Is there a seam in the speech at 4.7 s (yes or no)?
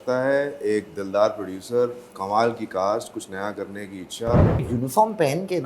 yes